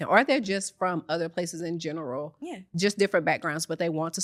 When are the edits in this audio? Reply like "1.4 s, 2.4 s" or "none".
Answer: none